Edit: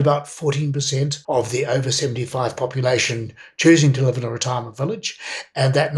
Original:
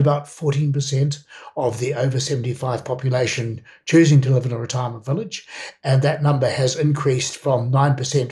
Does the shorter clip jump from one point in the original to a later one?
yes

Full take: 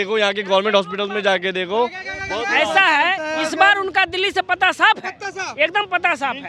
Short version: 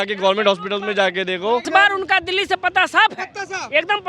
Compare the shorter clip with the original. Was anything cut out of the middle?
yes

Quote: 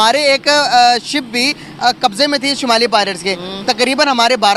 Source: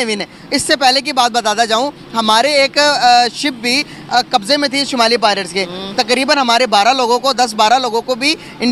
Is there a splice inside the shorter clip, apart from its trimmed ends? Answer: no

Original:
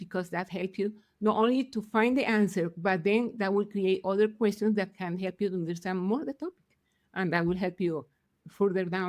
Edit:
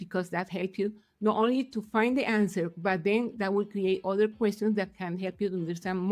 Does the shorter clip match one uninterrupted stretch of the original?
yes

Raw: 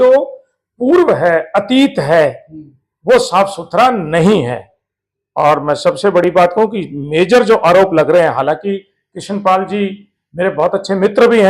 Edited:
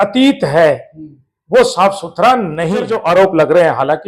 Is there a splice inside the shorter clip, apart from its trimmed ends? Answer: yes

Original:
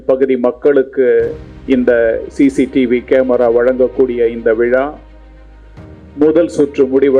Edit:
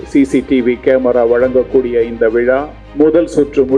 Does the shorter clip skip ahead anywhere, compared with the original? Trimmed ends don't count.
yes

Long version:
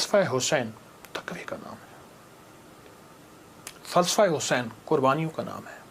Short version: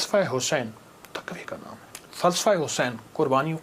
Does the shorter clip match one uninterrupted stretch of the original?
no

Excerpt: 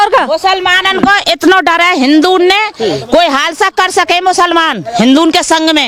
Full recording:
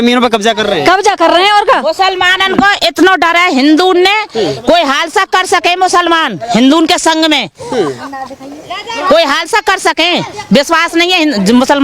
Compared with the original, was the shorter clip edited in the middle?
no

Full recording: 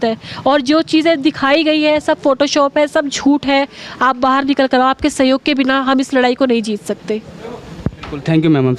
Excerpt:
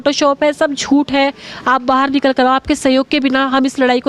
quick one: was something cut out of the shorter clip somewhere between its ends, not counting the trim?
no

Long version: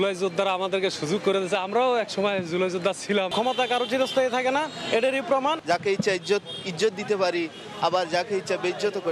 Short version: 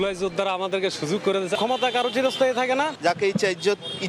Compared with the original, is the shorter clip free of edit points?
no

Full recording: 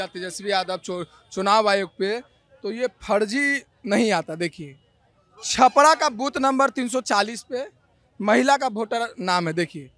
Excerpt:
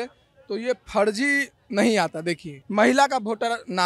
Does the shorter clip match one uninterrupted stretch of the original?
no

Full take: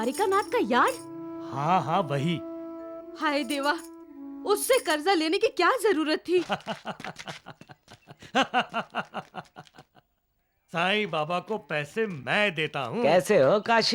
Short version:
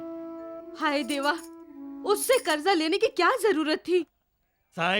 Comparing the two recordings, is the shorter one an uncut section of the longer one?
no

